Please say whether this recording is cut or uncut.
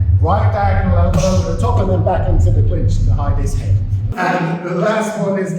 cut